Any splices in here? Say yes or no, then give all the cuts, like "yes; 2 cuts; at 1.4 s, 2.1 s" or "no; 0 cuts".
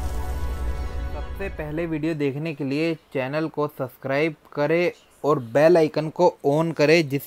no; 0 cuts